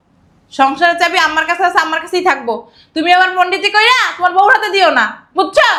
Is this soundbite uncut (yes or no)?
yes